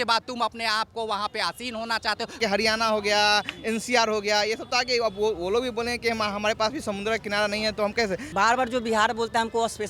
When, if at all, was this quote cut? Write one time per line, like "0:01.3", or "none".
0:02.4
0:08.2